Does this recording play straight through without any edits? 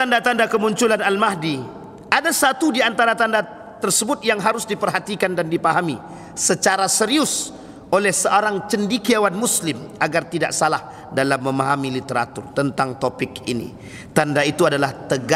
yes; 0 cuts

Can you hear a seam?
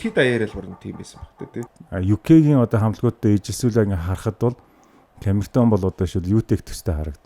yes; 1 cut; at 1.7 s

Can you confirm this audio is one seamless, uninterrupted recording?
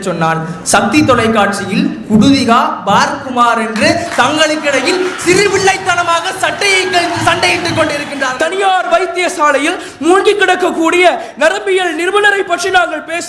no; 1 cut; at 8.2 s

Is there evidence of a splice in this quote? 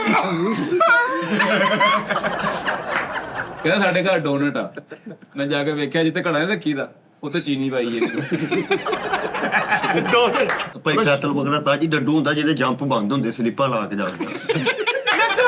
yes; 2 cuts; at 3.4 s, 10.7 s

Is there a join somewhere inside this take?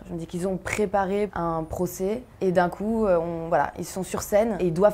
yes; 2 cuts; at 1.3 s, 2.3 s

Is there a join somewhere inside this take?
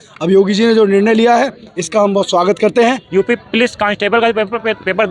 yes; 1 cut; at 3.0 s

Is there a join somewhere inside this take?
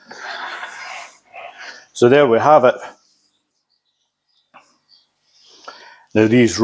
yes; 1 cut; at 3.5 s

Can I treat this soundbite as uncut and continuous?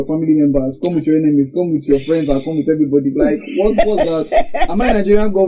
yes; 0 cuts

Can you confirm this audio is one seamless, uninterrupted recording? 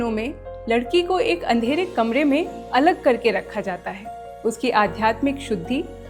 yes; 0 cuts

